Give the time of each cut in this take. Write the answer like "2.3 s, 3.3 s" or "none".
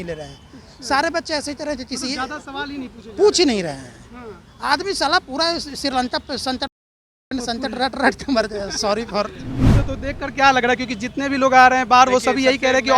9.5 s